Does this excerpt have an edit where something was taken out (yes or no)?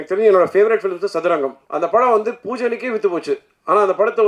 yes